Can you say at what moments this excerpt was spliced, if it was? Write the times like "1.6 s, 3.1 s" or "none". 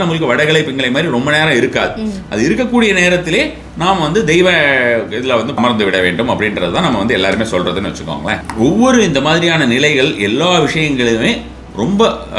5.6 s, 8.4 s